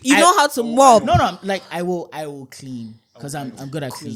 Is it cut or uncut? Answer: uncut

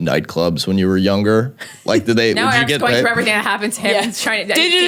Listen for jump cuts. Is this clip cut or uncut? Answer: uncut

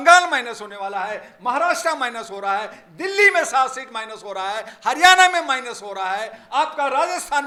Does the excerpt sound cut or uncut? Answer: uncut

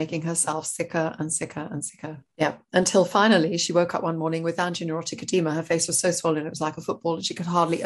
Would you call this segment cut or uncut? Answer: cut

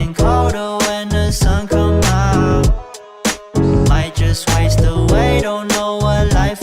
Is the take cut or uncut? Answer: uncut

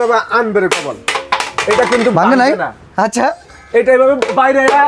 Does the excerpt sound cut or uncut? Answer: uncut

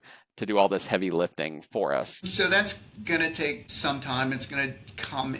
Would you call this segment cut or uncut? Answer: cut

